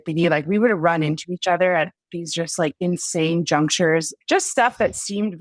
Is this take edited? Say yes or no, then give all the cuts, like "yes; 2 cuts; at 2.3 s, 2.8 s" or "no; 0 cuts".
yes; 1 cut; at 4.1 s